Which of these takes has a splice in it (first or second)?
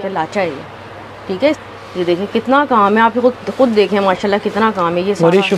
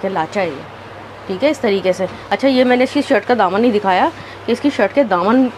first